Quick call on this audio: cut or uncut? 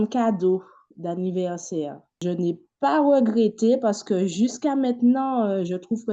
cut